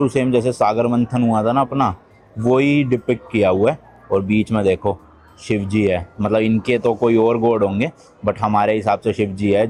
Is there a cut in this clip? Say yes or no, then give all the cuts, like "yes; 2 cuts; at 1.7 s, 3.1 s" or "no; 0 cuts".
no; 0 cuts